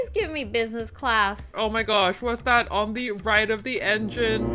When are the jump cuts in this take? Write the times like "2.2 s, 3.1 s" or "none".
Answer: 1.4 s

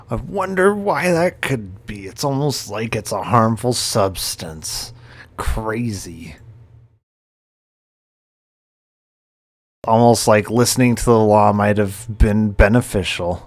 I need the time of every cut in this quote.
none

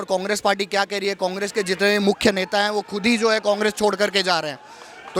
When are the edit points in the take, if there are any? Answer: none

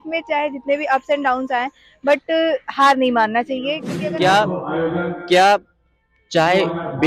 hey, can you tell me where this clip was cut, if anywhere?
3.9 s

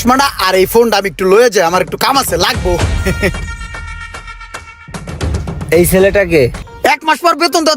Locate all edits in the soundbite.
6.6 s

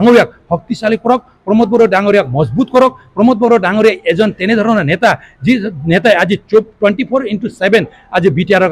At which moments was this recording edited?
none

